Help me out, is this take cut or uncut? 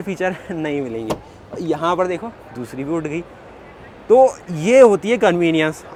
uncut